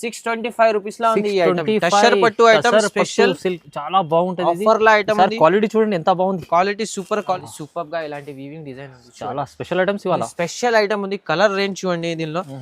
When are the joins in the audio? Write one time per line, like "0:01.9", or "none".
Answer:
0:07.4